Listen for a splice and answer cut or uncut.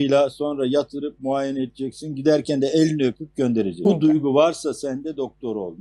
cut